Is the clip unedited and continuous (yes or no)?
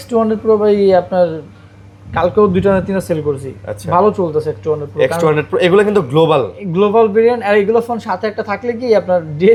yes